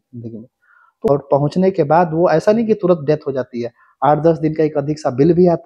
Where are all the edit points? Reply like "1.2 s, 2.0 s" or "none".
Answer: 1.1 s